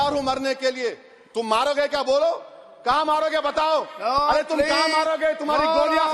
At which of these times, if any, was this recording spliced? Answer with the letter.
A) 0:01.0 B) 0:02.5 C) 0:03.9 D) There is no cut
D